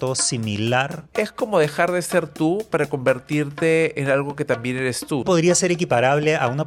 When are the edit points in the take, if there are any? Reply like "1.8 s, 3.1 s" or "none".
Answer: 1.0 s, 5.2 s